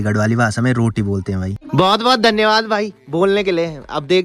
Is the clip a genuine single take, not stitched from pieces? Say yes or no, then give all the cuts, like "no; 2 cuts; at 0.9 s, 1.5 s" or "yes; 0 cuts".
no; 1 cut; at 1.6 s